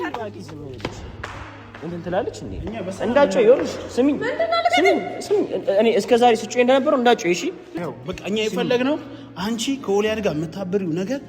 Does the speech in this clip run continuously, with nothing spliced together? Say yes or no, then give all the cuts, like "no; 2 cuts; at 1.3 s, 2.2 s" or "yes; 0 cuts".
no; 1 cut; at 7.7 s